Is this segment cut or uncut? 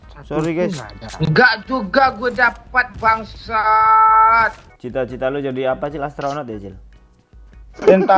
cut